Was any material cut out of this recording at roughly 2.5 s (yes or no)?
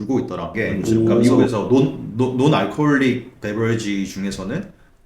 no